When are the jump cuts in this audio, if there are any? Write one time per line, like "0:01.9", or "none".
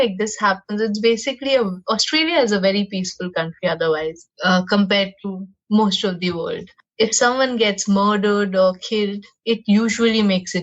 none